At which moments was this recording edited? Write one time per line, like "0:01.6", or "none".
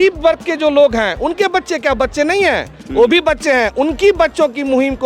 none